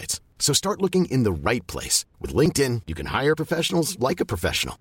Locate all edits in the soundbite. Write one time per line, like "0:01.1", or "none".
none